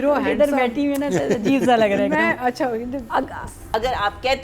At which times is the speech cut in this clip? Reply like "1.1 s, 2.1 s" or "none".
3.5 s